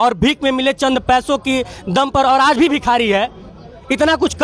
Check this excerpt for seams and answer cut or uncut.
uncut